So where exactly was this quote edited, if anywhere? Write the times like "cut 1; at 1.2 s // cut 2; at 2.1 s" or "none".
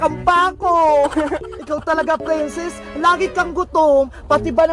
cut 1; at 1.5 s